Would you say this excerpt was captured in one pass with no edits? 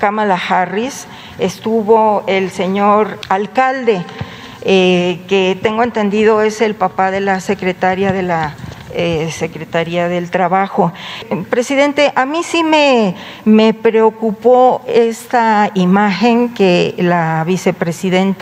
no; 2 cuts; at 3.2 s, 11.2 s

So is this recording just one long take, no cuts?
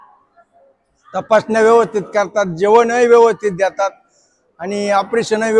yes; 0 cuts

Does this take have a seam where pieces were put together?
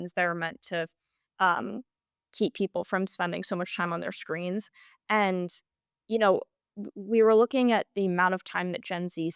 no; 0 cuts

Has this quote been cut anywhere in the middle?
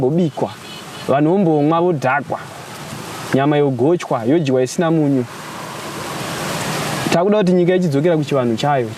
no; 0 cuts

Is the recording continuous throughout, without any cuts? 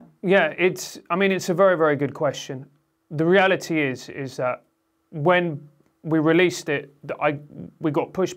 yes; 0 cuts

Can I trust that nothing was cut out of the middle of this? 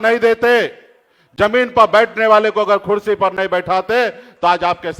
yes; 0 cuts

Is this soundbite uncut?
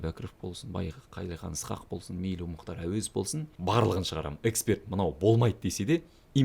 no; 1 cut; at 3.5 s

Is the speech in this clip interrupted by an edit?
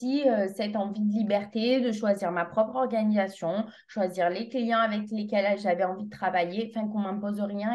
no; 0 cuts

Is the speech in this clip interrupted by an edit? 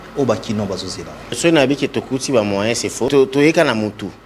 yes; 2 cuts; at 1.4 s, 3.1 s

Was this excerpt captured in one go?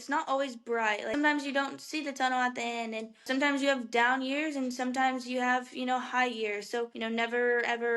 no; 3 cuts; at 1.1 s, 3.3 s, 6.9 s

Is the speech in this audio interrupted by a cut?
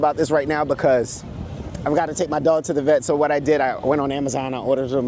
no; 0 cuts

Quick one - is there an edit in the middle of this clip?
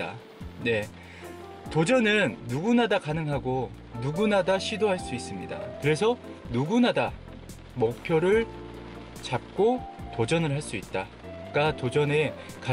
yes; 1 cut; at 5.6 s

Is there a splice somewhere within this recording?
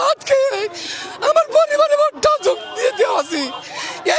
no; 0 cuts

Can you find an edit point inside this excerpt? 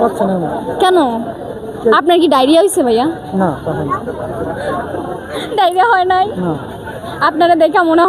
yes; 2 cuts; at 3.4 s, 5.5 s

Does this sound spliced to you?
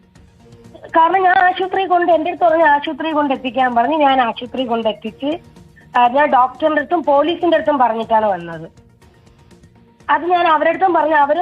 no; 0 cuts

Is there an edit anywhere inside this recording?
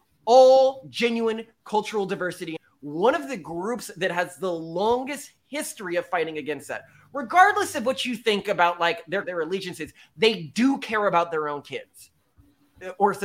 yes; 2 cuts; at 2.5 s, 9.3 s

